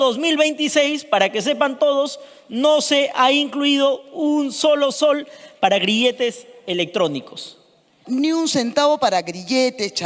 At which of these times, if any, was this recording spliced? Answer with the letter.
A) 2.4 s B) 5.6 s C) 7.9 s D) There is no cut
C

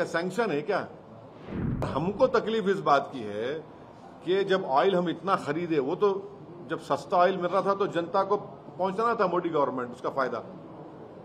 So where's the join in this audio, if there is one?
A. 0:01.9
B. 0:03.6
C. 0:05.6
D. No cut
A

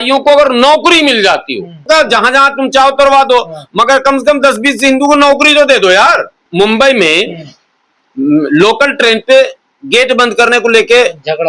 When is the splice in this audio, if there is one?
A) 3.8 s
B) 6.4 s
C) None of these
B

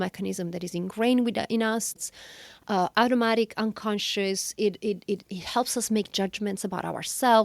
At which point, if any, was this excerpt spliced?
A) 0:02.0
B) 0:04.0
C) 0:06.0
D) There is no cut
A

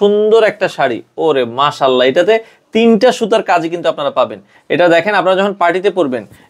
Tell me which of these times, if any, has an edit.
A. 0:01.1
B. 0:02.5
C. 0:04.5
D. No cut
C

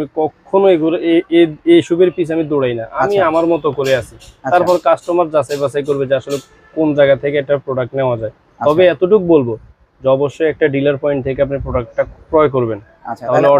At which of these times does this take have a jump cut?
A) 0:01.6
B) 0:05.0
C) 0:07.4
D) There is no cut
D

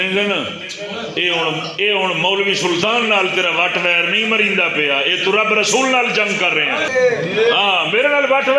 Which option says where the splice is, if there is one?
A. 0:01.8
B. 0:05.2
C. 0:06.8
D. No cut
C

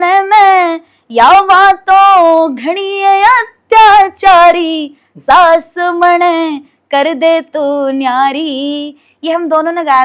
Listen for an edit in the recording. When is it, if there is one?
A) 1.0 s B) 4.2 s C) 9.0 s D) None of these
D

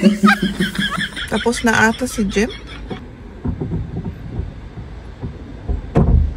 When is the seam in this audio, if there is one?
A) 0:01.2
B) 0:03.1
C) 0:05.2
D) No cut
A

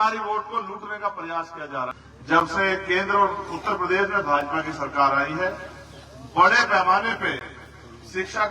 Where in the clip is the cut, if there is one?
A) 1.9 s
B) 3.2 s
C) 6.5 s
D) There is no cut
A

